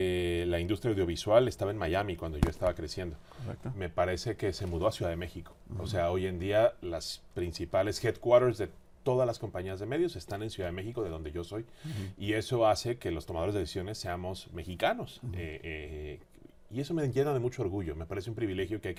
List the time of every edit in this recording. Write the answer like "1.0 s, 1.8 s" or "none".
none